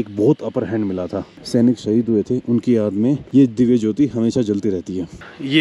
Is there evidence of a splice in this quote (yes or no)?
yes